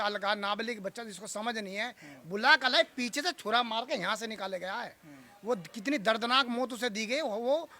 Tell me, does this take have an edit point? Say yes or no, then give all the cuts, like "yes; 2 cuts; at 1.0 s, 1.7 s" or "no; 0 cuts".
no; 0 cuts